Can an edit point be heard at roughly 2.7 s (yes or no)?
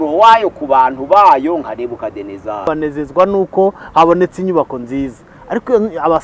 yes